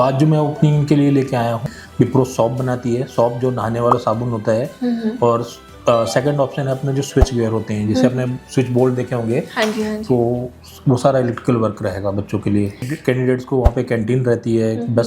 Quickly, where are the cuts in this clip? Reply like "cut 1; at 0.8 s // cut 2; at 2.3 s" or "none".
cut 1; at 1.6 s // cut 2; at 12.8 s